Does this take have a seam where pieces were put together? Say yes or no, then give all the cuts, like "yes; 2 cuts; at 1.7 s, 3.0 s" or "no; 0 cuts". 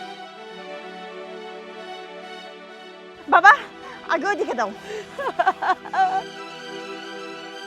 yes; 2 cuts; at 3.2 s, 6.2 s